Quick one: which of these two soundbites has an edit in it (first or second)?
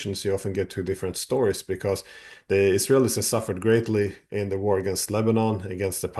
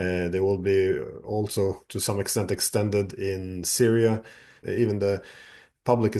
second